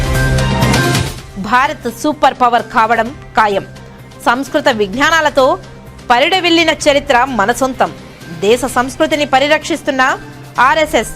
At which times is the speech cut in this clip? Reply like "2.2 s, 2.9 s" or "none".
1.2 s